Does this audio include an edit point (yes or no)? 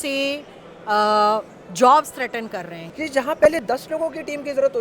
yes